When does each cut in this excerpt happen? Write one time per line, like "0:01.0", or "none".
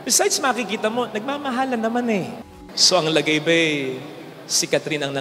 0:02.4